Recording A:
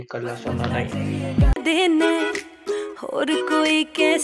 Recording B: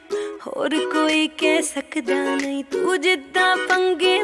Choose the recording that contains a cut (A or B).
A